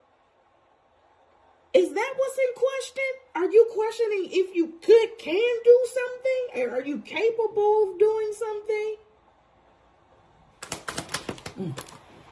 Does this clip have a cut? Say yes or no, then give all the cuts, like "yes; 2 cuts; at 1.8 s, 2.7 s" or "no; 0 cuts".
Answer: yes; 1 cut; at 10.8 s